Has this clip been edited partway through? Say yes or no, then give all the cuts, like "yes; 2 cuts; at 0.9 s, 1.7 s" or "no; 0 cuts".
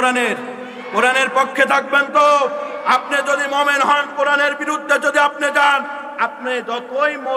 no; 0 cuts